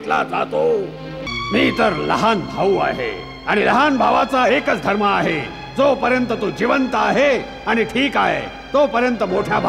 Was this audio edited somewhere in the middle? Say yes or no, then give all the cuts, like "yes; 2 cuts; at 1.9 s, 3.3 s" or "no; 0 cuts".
yes; 1 cut; at 1.2 s